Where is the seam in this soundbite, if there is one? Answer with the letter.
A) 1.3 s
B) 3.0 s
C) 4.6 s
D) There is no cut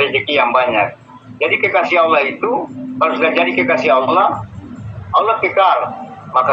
D